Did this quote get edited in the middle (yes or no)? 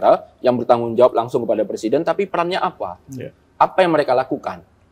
no